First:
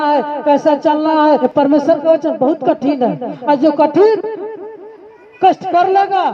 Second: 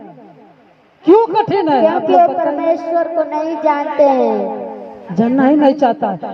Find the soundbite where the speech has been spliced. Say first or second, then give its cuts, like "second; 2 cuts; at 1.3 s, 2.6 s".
first; 1 cut; at 1.4 s